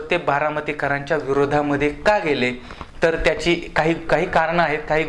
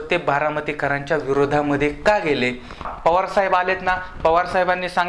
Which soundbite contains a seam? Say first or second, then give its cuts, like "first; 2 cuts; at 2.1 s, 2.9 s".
second; 1 cut; at 2.9 s